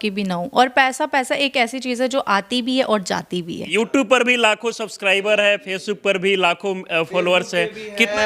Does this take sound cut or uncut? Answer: cut